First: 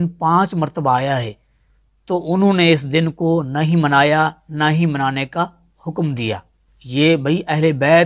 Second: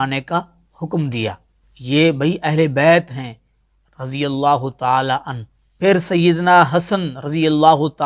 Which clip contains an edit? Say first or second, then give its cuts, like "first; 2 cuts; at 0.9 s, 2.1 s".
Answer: second; 1 cut; at 5.8 s